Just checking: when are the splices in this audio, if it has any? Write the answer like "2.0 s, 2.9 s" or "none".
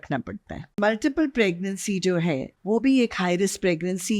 0.8 s, 2.5 s